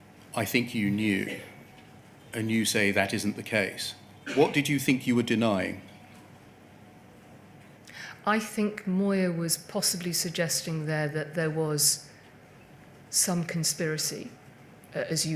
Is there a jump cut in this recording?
no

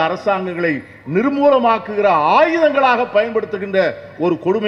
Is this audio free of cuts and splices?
yes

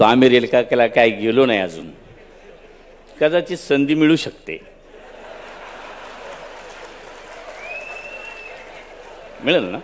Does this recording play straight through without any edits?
yes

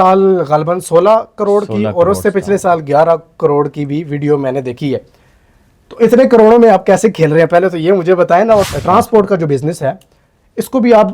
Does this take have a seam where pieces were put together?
yes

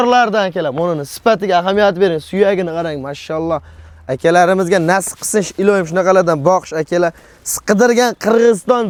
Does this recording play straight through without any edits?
yes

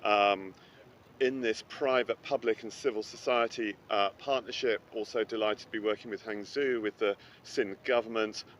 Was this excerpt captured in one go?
yes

